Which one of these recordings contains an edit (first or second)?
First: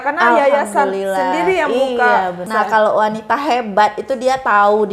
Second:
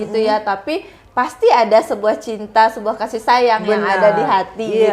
first